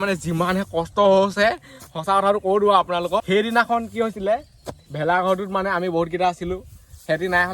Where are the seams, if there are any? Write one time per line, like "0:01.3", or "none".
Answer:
0:03.2